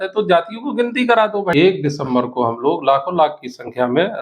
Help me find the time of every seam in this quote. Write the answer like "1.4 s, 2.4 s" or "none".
1.5 s